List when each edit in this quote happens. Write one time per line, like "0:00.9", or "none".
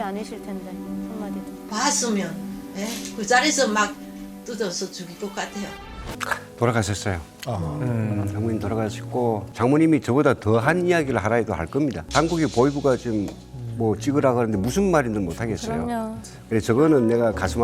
0:06.1
0:09.5
0:12.0